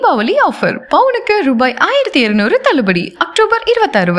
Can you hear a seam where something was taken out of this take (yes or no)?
no